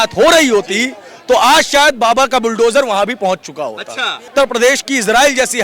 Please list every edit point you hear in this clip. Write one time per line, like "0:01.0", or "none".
0:04.3